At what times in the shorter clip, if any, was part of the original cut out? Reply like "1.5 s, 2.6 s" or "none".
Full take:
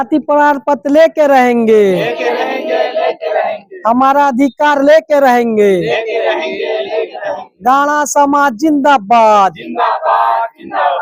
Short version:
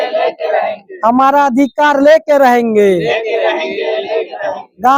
none